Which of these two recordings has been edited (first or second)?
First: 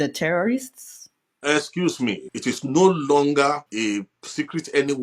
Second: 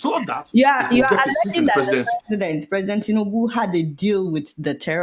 first